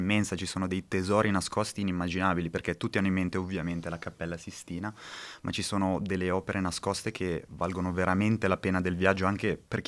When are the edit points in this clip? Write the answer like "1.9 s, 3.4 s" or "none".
none